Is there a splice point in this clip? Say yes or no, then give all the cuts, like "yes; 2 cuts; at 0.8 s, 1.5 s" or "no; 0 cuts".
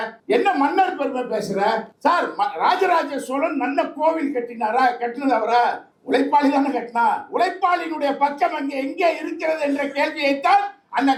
no; 0 cuts